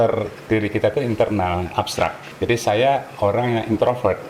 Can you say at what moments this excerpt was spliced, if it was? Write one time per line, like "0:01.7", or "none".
0:02.2